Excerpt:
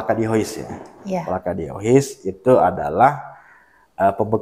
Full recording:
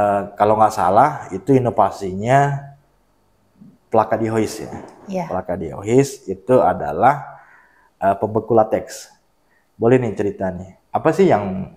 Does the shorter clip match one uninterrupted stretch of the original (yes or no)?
yes